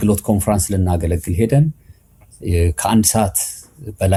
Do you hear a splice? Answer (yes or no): no